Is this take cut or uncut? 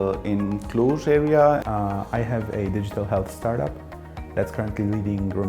cut